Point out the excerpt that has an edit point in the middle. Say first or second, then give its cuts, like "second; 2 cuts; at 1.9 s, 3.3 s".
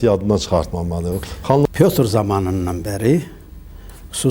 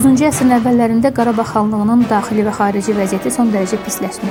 first; 1 cut; at 1.7 s